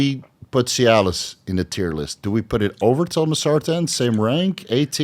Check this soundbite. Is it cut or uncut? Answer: uncut